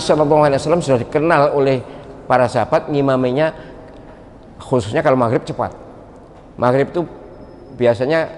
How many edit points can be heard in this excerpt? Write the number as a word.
zero